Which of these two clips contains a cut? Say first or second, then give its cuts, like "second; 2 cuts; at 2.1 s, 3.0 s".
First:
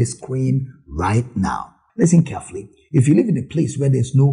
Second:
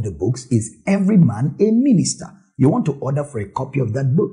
first; 1 cut; at 1.8 s